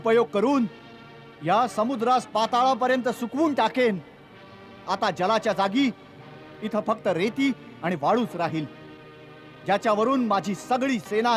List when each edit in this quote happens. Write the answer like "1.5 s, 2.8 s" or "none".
none